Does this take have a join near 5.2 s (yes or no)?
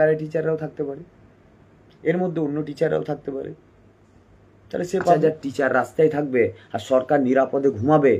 yes